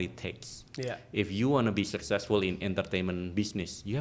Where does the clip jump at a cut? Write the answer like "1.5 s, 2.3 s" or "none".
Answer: none